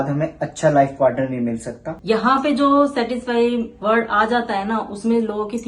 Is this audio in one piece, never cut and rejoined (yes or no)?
no